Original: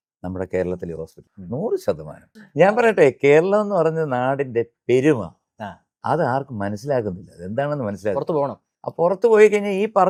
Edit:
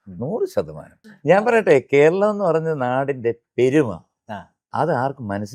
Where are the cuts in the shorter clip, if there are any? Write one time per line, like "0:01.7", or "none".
none